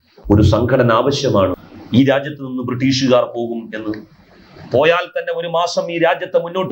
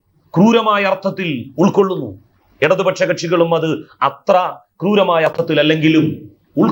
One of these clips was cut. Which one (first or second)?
first